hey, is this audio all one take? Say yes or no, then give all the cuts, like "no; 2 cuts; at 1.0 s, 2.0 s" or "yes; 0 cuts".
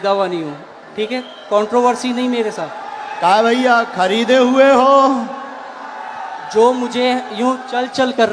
yes; 0 cuts